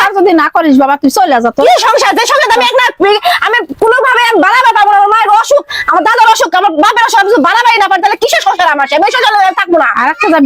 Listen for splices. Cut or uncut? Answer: uncut